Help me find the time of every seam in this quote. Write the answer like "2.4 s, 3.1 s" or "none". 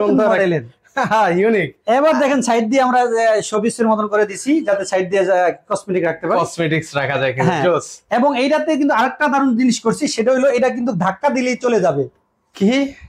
none